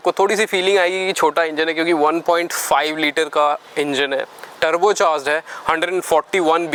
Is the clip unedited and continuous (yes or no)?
yes